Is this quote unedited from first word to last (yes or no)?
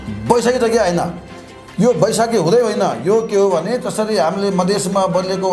yes